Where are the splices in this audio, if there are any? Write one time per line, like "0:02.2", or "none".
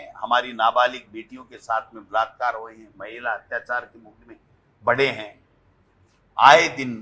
none